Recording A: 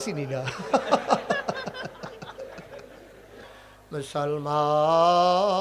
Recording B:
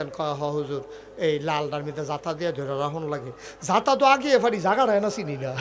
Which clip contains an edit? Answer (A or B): A